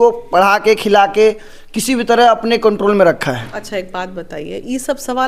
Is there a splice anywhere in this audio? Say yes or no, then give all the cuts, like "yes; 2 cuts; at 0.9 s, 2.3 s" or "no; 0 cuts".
no; 0 cuts